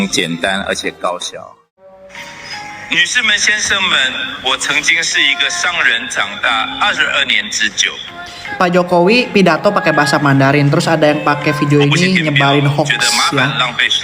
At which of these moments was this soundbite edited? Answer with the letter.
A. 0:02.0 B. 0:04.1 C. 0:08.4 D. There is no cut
A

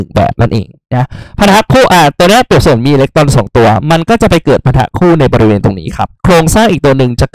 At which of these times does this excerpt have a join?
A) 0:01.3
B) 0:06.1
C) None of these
B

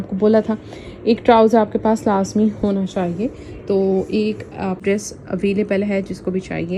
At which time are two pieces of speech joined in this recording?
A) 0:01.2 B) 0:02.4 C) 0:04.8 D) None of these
C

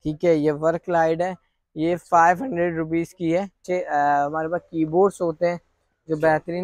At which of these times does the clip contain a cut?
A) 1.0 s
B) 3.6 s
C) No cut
B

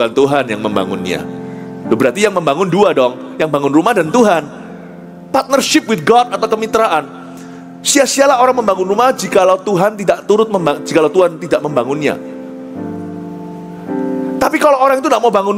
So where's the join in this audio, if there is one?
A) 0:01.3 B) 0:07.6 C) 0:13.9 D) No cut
D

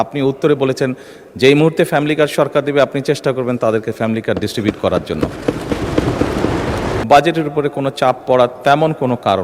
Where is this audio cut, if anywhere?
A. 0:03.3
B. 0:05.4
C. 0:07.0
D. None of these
C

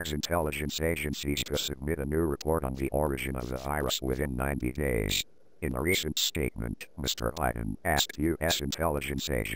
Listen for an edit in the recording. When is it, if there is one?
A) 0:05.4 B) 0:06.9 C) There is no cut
C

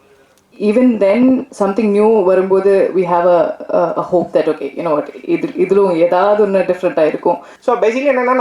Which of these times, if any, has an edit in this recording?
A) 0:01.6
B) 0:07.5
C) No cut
B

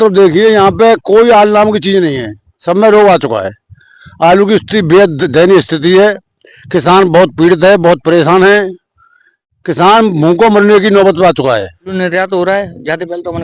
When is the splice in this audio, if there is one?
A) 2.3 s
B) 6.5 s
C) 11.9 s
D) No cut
C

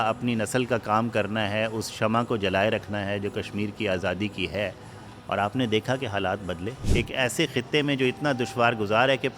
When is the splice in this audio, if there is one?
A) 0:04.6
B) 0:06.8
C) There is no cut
B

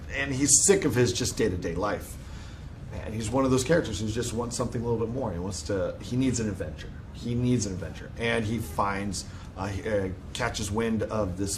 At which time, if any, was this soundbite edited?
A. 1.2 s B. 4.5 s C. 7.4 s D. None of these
C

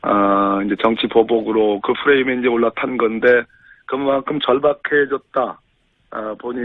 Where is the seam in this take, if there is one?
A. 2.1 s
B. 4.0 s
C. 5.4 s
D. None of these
B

